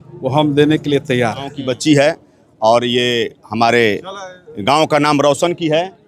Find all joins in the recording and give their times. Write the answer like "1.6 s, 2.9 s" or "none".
1.7 s